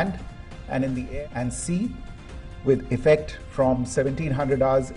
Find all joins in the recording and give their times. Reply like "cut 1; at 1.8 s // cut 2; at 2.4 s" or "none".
cut 1; at 1.0 s